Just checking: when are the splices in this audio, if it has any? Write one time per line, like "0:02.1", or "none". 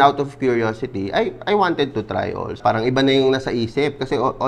0:02.6

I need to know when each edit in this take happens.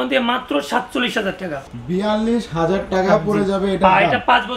0:01.5

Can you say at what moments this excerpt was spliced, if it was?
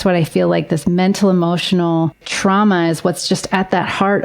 0:02.3

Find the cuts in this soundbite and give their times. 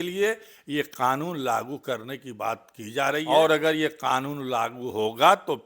0:03.2

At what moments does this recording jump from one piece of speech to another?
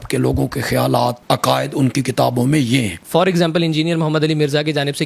0:01.2
0:03.0

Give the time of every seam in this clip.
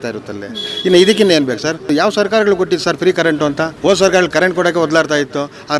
0:01.9
0:03.7

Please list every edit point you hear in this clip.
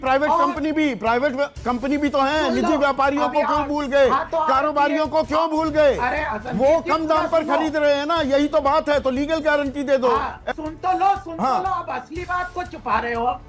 0:10.4

